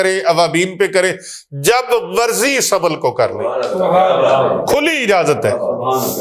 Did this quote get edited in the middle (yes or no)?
no